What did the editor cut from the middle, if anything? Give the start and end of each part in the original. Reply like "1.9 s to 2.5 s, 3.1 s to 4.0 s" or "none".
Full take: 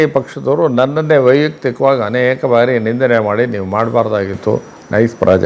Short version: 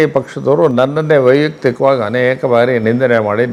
none